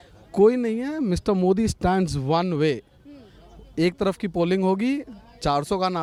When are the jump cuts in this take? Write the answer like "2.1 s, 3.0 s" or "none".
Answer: none

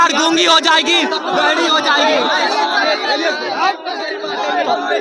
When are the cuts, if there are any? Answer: none

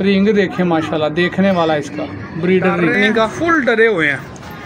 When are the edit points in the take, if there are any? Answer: 3.0 s

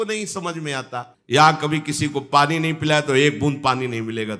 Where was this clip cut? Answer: 1.0 s

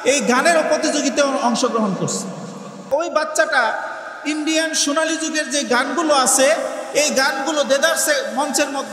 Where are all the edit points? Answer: 2.9 s

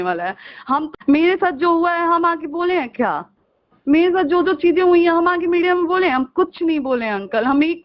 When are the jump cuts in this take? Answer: 0.9 s

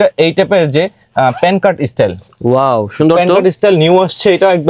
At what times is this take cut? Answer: none

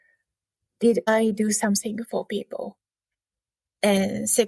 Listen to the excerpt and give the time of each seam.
1.1 s

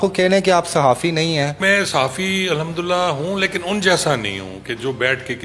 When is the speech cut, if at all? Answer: 1.6 s

